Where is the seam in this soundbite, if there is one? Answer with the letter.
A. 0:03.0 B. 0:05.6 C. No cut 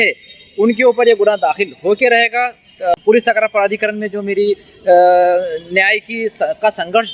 C